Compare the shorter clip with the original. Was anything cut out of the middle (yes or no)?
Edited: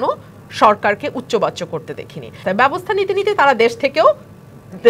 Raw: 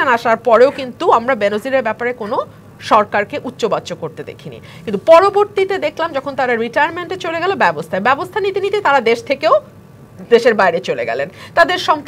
yes